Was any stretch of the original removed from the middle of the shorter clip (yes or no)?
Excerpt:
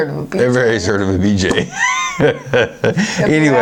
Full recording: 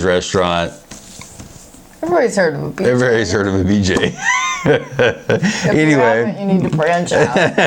no